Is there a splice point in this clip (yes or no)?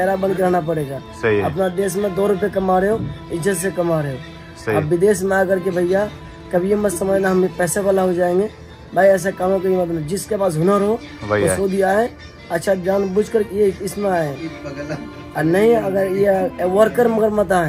no